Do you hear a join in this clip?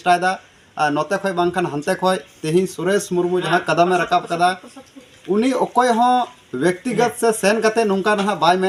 no; 0 cuts

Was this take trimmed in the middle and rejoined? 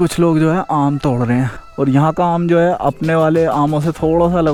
no; 0 cuts

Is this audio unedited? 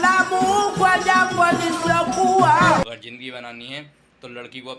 no; 1 cut; at 2.8 s

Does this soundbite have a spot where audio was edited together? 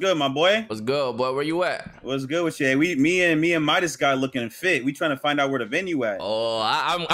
no; 0 cuts

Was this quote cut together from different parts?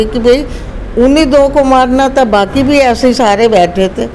no; 0 cuts

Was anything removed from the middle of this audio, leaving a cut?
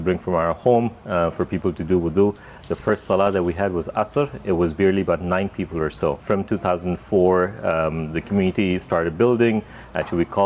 no; 0 cuts

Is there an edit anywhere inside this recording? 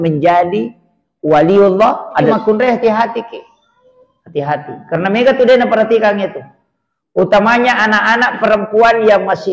yes; 1 cut; at 2.3 s

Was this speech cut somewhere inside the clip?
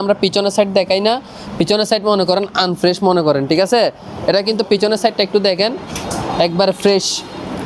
no; 0 cuts

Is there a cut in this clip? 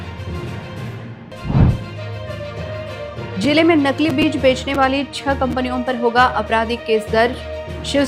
yes; 1 cut; at 1.2 s

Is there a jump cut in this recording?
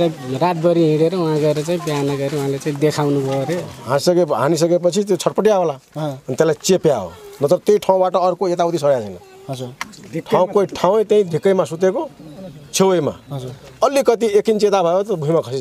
yes; 1 cut; at 3.8 s

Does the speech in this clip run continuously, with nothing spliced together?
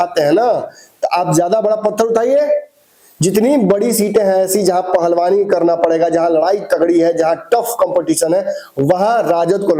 yes; 0 cuts

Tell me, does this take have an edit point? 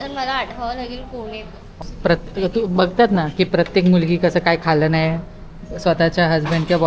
yes; 1 cut; at 1.8 s

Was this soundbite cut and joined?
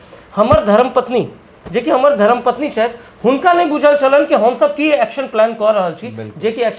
no; 0 cuts

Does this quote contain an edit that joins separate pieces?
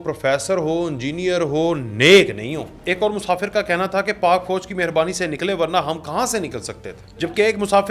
yes; 2 cuts; at 2.8 s, 7.2 s

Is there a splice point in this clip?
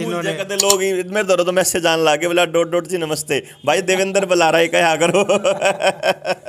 no; 0 cuts

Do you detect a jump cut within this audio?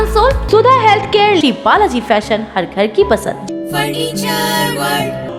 no; 0 cuts

